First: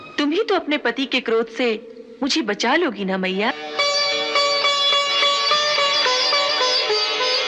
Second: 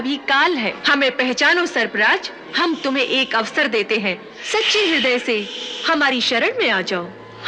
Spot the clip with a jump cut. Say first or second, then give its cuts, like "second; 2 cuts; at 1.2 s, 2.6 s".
second; 3 cuts; at 0.8 s, 2.5 s, 4.3 s